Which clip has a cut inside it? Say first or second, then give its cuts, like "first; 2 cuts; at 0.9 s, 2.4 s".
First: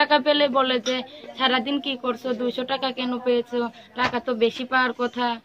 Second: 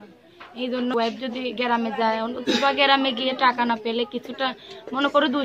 second; 1 cut; at 0.9 s